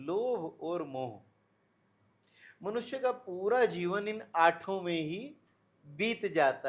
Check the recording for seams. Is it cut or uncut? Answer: uncut